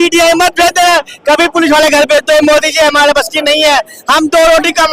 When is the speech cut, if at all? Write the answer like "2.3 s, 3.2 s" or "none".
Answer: none